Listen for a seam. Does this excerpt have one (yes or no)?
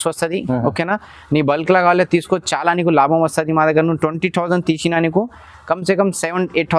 no